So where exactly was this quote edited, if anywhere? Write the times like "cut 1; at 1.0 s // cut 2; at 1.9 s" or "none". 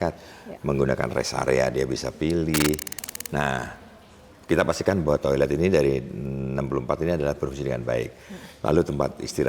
cut 1; at 3.0 s

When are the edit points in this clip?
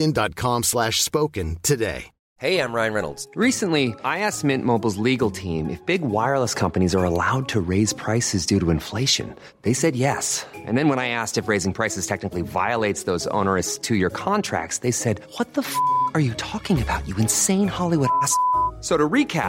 cut 1; at 2.2 s

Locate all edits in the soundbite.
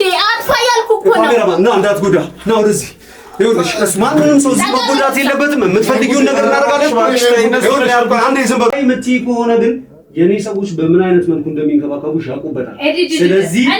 cut 1; at 8.7 s

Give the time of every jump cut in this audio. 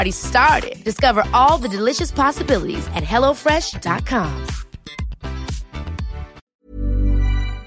cut 1; at 6.6 s

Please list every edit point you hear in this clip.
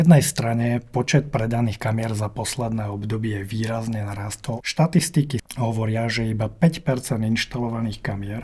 cut 1; at 4.6 s // cut 2; at 5.4 s

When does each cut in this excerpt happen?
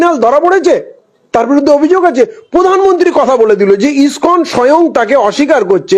none

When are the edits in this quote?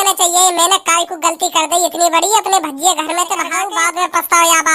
cut 1; at 3.6 s

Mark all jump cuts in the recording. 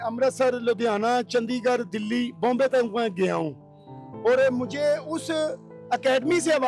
none

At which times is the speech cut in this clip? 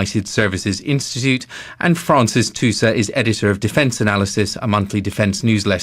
cut 1; at 2.2 s

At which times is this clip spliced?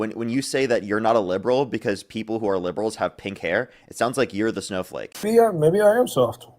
cut 1; at 5.2 s

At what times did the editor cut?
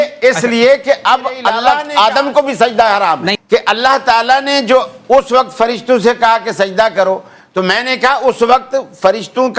cut 1; at 1.6 s // cut 2; at 3.3 s

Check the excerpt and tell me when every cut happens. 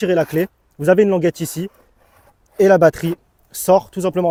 none

